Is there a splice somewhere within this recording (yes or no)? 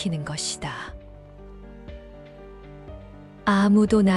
no